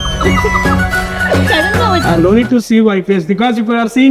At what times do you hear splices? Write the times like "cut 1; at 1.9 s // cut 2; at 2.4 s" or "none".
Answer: cut 1; at 2.0 s